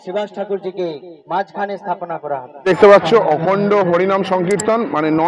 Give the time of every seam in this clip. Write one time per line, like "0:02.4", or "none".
0:02.5